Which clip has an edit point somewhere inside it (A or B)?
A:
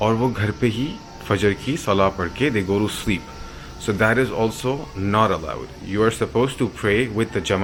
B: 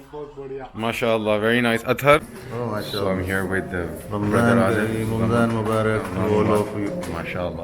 B